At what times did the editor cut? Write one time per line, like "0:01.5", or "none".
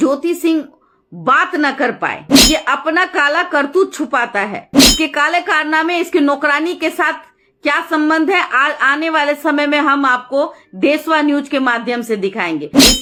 none